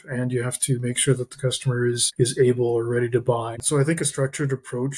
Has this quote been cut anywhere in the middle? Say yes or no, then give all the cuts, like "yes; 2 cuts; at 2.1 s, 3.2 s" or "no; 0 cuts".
yes; 2 cuts; at 2.1 s, 3.6 s